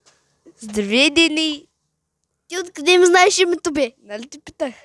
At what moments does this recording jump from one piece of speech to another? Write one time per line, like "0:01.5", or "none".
none